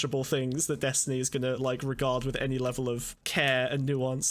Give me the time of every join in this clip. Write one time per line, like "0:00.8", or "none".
0:03.2